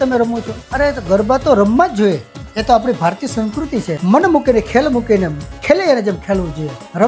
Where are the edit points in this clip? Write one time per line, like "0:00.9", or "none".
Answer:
0:03.9